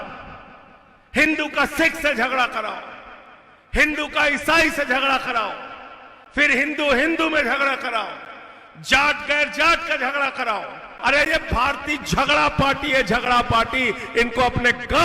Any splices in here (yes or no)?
yes